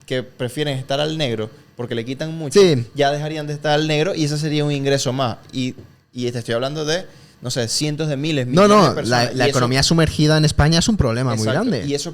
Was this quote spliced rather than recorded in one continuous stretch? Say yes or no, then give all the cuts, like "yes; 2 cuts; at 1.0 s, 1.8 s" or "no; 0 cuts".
no; 0 cuts